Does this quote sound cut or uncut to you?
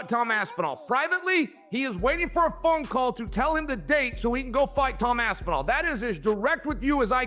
uncut